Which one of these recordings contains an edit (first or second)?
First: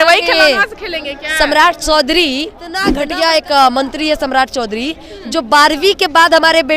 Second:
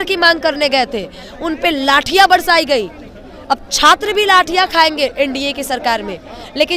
first